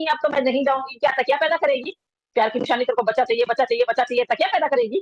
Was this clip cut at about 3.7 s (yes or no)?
no